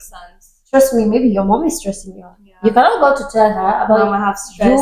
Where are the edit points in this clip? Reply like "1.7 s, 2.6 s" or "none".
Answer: none